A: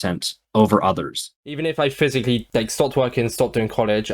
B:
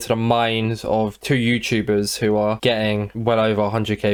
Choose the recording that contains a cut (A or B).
A